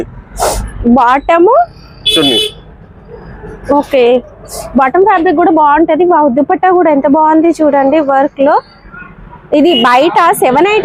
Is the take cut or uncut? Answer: uncut